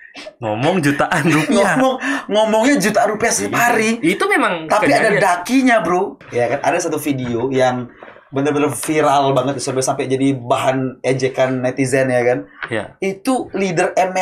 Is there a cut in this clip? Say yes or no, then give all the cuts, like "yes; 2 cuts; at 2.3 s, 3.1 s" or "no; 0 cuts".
yes; 1 cut; at 6.2 s